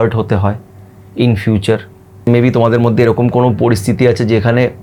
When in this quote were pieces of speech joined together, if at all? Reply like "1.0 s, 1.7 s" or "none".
2.3 s